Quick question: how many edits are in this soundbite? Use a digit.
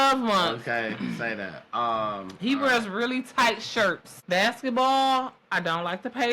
1